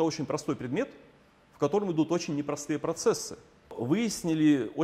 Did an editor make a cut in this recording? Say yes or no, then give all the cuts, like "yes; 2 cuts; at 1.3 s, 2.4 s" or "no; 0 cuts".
yes; 1 cut; at 3.8 s